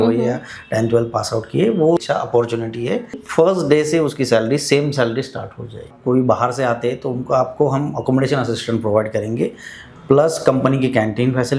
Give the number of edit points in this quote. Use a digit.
3